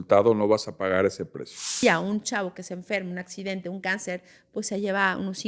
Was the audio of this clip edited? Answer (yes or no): yes